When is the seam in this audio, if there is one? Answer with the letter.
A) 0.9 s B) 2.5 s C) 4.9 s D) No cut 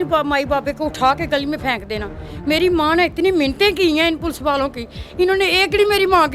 D